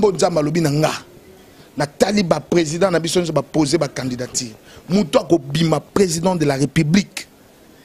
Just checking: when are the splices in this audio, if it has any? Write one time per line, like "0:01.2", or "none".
none